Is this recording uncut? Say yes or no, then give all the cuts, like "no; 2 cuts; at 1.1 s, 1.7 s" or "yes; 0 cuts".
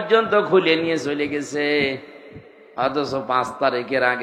yes; 0 cuts